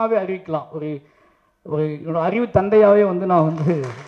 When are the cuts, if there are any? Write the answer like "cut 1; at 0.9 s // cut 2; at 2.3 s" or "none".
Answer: none